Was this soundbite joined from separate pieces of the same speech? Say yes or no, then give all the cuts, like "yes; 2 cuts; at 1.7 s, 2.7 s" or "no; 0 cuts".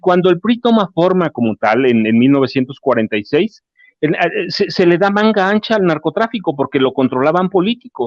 no; 0 cuts